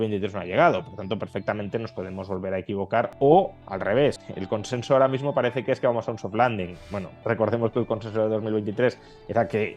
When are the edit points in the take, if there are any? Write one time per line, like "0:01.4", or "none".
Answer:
0:03.1
0:04.2
0:07.1